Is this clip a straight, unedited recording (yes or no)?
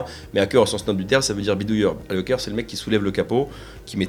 yes